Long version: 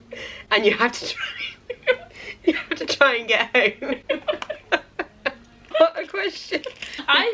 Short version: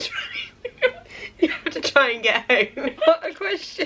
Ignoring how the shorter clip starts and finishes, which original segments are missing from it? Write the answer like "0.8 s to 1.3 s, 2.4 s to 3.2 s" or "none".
4.0 s to 5.7 s